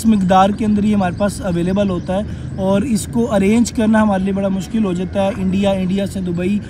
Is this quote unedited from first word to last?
yes; 0 cuts

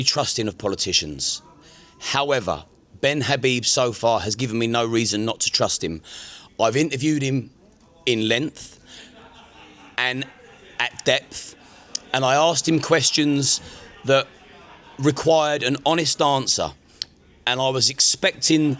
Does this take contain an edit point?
no; 0 cuts

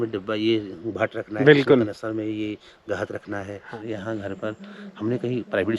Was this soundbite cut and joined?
yes; 1 cut; at 3.8 s

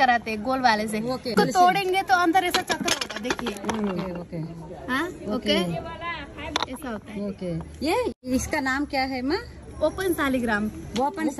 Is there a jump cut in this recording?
no; 0 cuts

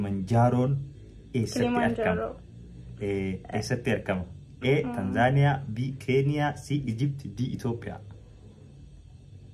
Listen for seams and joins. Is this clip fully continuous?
yes; 0 cuts

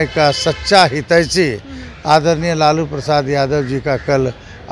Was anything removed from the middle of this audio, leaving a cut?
no; 0 cuts

